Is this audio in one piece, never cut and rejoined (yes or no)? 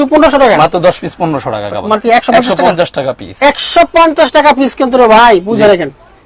yes